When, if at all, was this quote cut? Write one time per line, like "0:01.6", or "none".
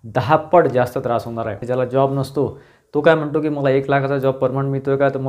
0:01.6

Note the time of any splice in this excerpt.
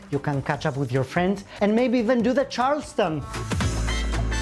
none

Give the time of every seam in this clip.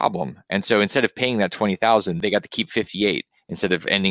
0:02.2

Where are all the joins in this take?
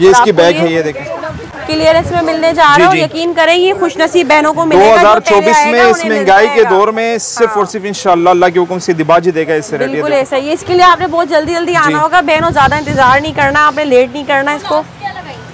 none

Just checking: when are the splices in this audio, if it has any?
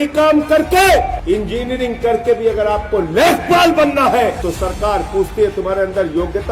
0:01.2
0:04.4

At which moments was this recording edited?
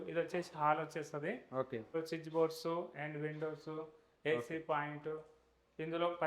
0:01.9

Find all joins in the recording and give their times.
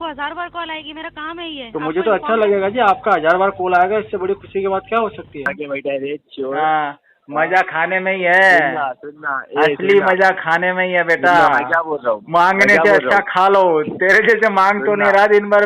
0:05.5

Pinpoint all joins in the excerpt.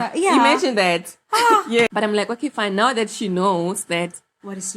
0:01.7

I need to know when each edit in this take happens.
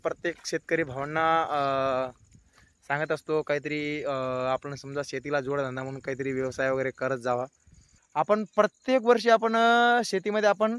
0:08.0

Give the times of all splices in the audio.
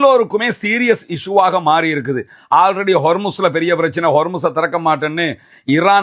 none

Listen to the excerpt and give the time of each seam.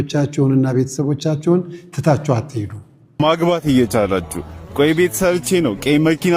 0:03.2

